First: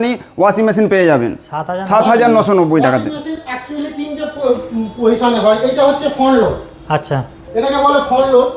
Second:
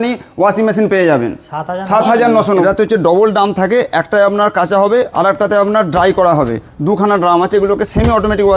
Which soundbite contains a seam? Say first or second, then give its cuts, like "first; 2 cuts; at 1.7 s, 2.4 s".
second; 1 cut; at 2.6 s